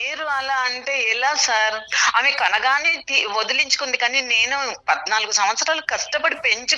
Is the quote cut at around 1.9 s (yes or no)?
yes